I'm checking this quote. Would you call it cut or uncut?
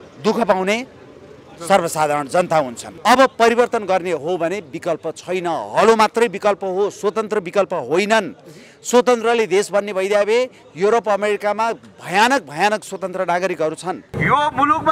cut